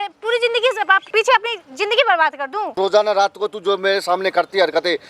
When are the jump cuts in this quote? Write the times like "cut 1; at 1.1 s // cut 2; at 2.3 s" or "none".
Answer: cut 1; at 1.0 s // cut 2; at 2.8 s